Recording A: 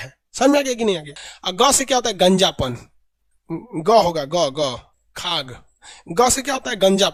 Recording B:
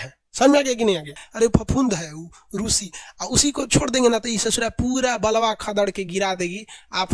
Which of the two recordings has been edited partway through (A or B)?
B